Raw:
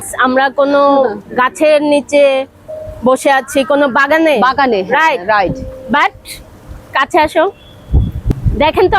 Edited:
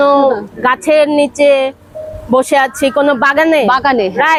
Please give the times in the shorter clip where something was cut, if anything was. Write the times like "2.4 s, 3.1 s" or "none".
none